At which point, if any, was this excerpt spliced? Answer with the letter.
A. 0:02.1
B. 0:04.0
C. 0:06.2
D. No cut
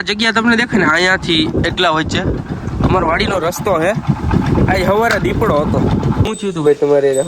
C